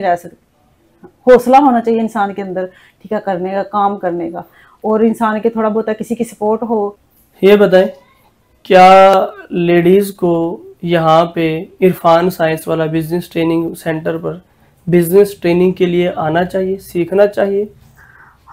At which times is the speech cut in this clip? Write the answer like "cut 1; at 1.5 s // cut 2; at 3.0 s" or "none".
none